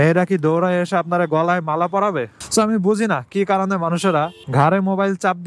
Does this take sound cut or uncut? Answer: uncut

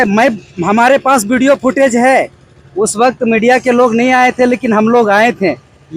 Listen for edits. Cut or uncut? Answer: uncut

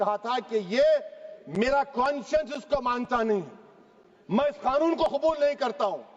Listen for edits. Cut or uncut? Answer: uncut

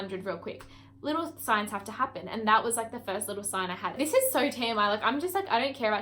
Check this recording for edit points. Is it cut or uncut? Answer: cut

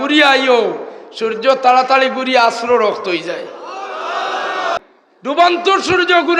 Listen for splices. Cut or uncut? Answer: cut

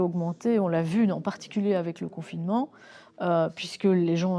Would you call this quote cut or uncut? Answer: uncut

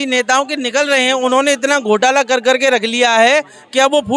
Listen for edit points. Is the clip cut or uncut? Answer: uncut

